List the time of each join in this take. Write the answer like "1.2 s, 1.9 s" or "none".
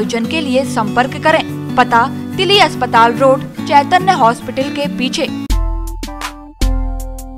5.5 s